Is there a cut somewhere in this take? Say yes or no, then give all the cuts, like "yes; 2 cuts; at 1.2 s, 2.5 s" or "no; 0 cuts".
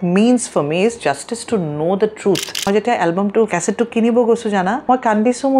yes; 3 cuts; at 2.7 s, 3.5 s, 4.8 s